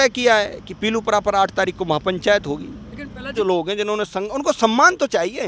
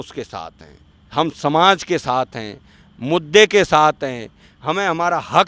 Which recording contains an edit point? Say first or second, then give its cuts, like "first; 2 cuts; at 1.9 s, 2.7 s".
first; 1 cut; at 3.3 s